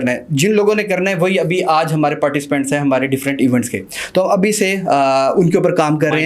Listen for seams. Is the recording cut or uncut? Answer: uncut